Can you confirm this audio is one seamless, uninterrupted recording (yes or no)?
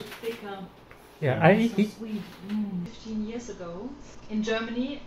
no